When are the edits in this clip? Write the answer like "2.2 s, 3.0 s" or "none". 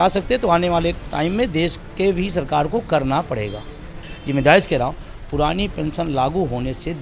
4.1 s